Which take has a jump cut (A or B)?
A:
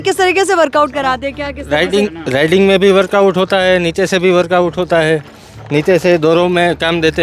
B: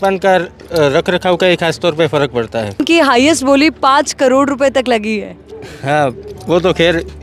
B